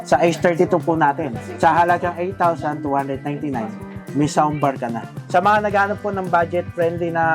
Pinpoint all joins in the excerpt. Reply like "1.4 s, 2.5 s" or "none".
1.5 s, 5.1 s